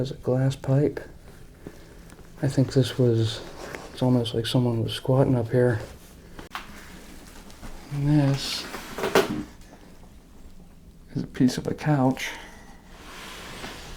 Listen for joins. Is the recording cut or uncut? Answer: cut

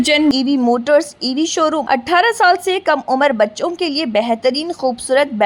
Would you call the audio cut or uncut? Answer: cut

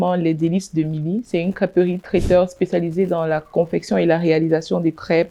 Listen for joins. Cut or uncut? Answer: uncut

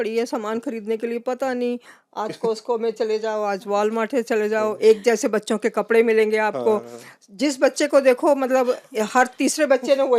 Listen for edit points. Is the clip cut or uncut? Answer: uncut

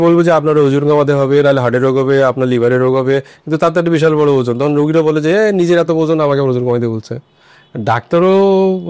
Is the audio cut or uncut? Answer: uncut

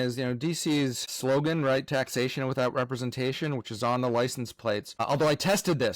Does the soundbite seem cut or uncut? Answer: cut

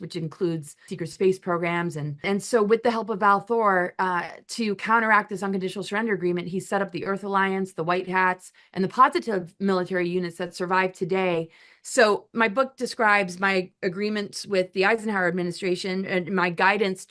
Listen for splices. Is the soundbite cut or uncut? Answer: cut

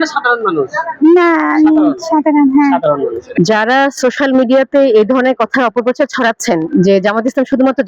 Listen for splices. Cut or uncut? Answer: cut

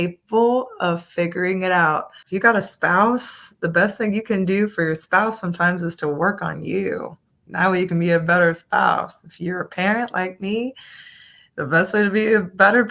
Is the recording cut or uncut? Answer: cut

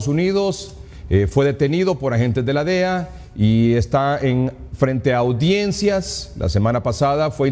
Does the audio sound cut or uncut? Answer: cut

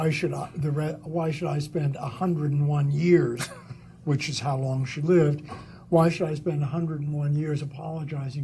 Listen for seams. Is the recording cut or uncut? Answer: uncut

